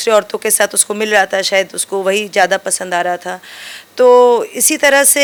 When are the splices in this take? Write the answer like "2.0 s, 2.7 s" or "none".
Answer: none